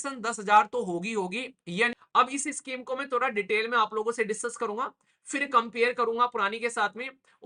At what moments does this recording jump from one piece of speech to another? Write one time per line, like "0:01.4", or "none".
0:02.0